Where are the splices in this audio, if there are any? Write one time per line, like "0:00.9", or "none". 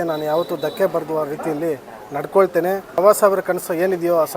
0:03.0